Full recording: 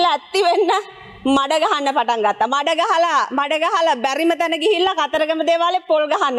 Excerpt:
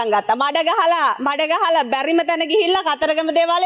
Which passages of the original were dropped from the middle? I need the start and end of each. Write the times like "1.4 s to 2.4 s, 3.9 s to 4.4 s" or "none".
none